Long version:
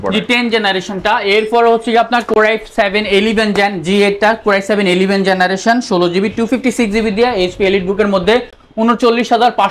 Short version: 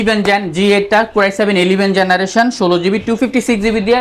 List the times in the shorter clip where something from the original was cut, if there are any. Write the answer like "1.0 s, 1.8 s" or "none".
none